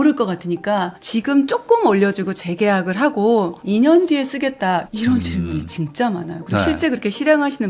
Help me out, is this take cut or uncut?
uncut